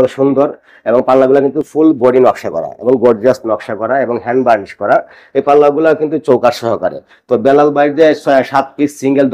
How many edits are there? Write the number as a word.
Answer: zero